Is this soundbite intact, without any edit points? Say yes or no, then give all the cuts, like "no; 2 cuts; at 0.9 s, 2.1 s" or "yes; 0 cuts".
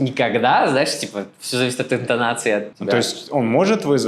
no; 1 cut; at 2.7 s